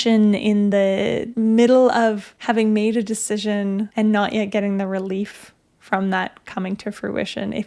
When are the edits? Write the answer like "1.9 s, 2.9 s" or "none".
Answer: 1.2 s, 2.3 s, 3.9 s

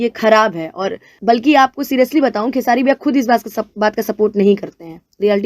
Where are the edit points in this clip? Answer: 1.2 s

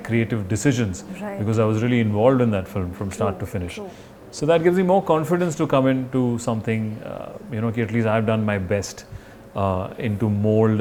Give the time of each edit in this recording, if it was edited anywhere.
none

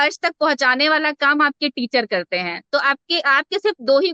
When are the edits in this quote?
none

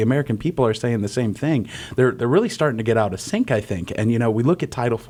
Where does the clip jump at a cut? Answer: none

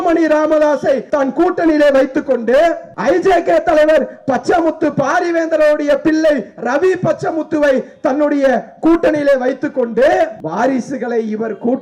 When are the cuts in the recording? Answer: 1.1 s, 2.9 s, 10.4 s

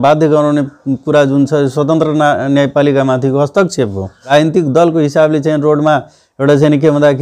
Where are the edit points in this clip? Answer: 4.2 s

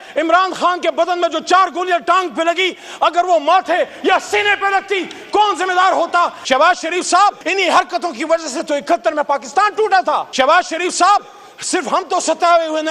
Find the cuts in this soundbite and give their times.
6.4 s, 7.4 s, 10.3 s

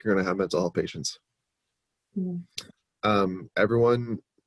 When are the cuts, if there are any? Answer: none

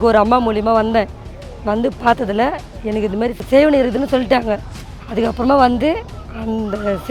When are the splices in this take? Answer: 3.4 s

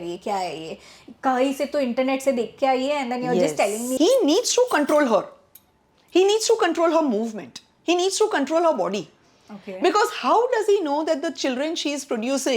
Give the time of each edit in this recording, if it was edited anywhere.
3.9 s

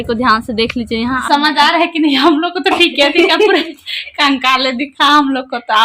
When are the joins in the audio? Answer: 1.2 s

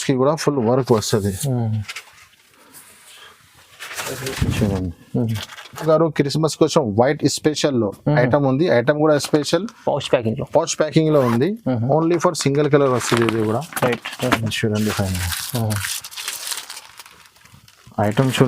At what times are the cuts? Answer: 5.8 s

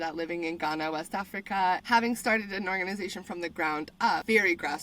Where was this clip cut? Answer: 1.8 s

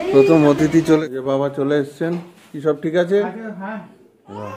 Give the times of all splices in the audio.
1.0 s

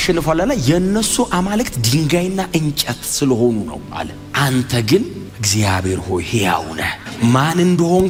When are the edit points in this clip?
none

